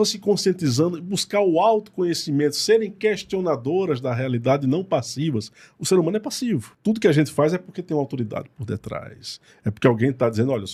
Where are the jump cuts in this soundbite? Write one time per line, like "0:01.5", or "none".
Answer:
none